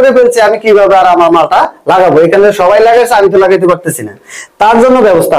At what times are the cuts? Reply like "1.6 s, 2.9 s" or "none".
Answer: none